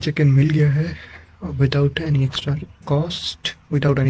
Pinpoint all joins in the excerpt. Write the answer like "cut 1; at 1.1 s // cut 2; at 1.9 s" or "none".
none